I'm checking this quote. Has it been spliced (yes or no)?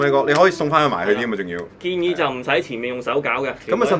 yes